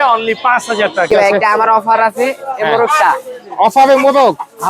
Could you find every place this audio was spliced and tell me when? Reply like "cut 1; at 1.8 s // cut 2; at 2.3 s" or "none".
cut 1; at 1.1 s